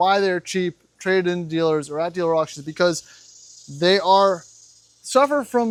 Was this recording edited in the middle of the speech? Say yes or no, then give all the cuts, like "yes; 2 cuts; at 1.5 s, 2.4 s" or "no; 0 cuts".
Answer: no; 0 cuts